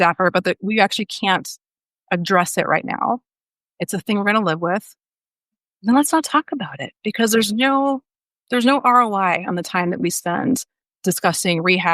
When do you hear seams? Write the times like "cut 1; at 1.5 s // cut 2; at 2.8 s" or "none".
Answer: cut 1; at 10.9 s